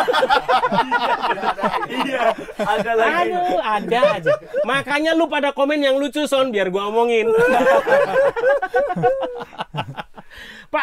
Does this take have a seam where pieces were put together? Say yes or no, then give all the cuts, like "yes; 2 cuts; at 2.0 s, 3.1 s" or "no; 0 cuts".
no; 0 cuts